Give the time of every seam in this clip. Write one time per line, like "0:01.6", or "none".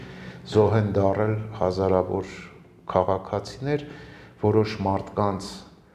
none